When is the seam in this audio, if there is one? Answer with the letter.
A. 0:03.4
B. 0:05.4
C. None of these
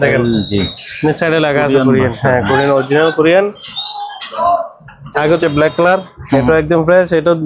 B